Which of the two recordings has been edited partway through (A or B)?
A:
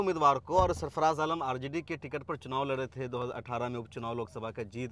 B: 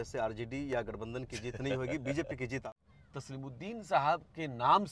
B